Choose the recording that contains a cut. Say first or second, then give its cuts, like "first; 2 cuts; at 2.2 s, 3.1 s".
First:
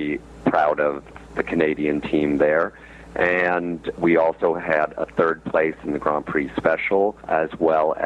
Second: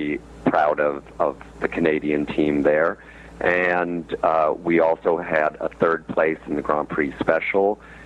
first; 3 cuts; at 1.1 s, 3.9 s, 7.2 s